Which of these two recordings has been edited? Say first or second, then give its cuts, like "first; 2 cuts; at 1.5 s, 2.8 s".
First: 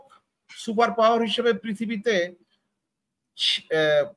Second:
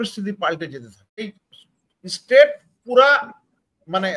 second; 1 cut; at 1.2 s